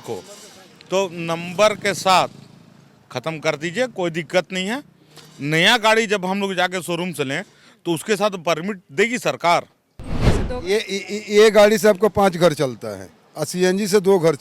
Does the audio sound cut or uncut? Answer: cut